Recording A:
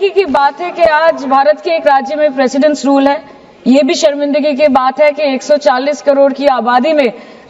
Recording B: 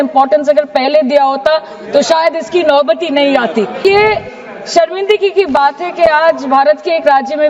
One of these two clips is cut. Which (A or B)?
B